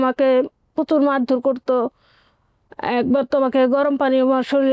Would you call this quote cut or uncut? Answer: uncut